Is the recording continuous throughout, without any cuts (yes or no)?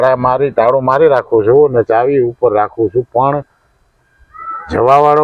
yes